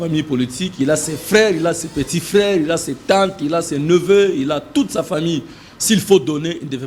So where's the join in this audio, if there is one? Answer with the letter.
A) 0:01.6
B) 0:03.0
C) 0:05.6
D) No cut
D